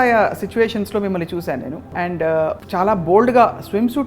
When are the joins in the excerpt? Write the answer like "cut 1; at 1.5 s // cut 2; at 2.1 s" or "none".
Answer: cut 1; at 1.8 s // cut 2; at 2.6 s